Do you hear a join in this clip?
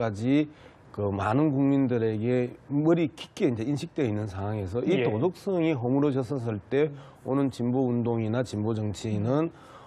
no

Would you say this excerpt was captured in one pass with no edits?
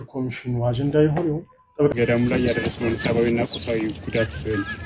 no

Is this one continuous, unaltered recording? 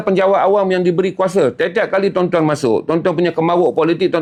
yes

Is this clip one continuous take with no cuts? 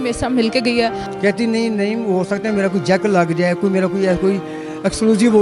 no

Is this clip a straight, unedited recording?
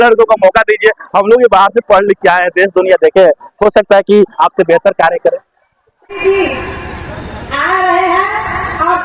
yes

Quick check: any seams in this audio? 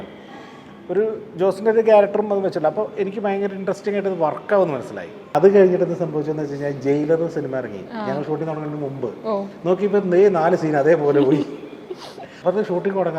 yes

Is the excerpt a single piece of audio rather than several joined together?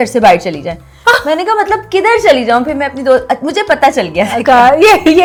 yes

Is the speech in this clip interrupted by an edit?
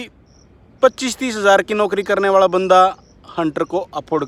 no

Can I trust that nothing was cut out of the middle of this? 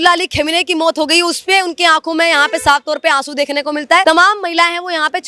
no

